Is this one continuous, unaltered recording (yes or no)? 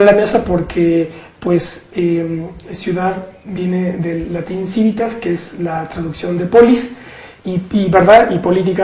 yes